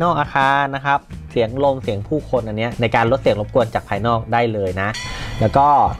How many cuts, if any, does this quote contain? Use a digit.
2